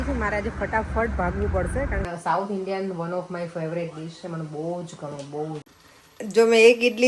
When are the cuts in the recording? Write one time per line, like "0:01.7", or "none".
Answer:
0:02.0
0:05.7